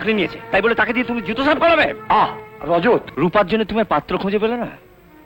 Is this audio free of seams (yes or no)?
no